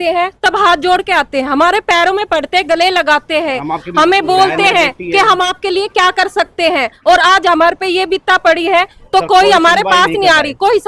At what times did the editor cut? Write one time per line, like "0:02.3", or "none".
none